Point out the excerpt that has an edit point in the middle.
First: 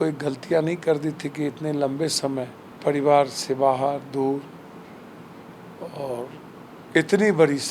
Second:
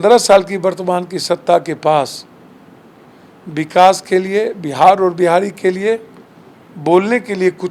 first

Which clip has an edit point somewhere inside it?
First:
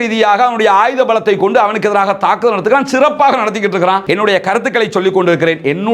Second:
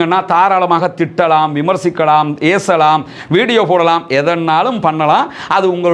first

